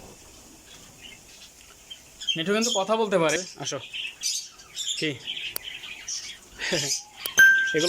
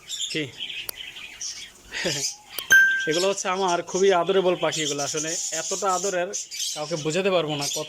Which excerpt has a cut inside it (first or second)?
first